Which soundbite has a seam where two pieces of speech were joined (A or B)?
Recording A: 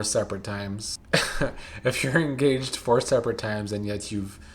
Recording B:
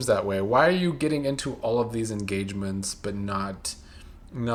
A